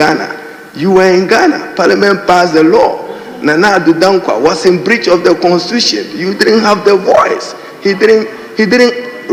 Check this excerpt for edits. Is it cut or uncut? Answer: uncut